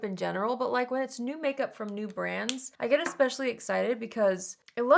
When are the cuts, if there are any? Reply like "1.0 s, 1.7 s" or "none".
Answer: 2.6 s